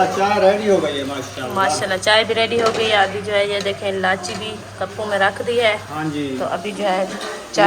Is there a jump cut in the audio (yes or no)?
no